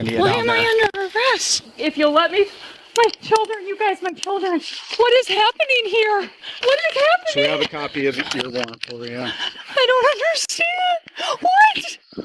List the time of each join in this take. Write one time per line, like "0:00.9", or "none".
0:06.4